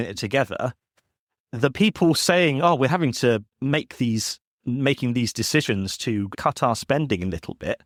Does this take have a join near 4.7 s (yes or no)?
no